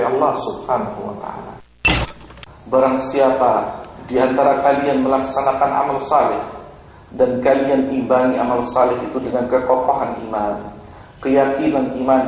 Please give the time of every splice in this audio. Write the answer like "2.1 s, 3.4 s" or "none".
2.1 s